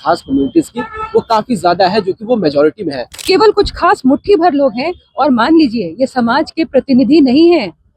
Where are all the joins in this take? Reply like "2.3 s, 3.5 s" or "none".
3.1 s